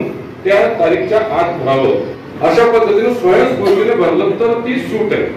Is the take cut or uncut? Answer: cut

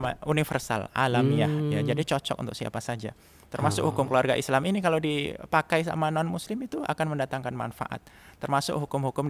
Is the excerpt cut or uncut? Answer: uncut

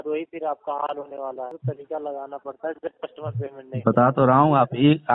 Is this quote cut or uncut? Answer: cut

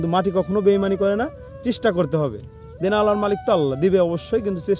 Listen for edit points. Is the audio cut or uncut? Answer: uncut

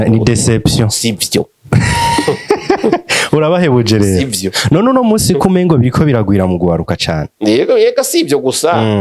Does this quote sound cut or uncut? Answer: uncut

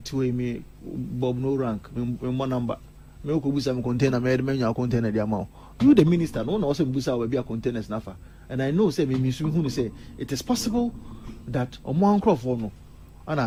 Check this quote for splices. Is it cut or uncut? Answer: uncut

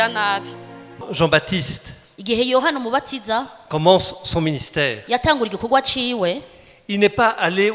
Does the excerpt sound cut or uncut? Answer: cut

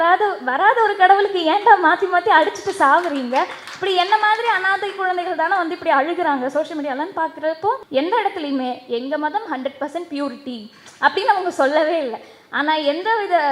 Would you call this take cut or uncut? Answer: cut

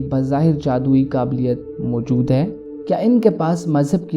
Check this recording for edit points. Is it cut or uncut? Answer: cut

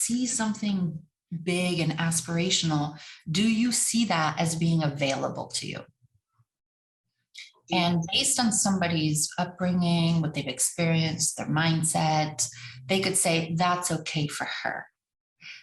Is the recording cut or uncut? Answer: uncut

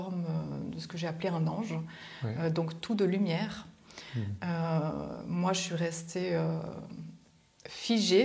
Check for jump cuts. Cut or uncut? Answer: uncut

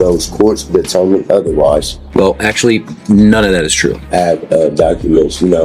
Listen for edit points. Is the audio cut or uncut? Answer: cut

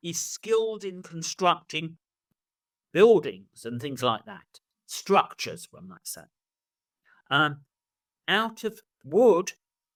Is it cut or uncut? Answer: uncut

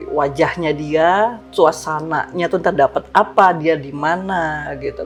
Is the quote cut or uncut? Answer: uncut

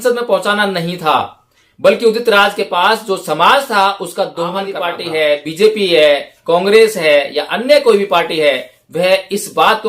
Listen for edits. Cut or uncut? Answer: cut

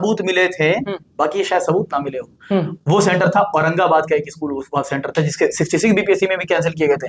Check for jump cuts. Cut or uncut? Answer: uncut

